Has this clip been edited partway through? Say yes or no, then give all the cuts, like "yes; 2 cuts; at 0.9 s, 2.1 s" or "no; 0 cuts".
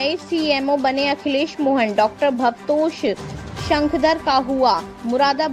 no; 0 cuts